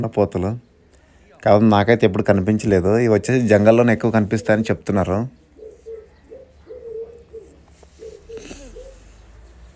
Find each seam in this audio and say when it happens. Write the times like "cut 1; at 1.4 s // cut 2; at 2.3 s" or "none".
none